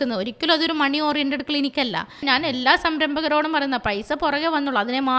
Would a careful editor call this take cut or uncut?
cut